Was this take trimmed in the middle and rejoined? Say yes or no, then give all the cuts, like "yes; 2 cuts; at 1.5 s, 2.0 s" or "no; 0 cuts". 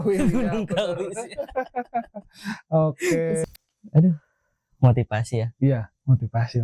yes; 1 cut; at 3.4 s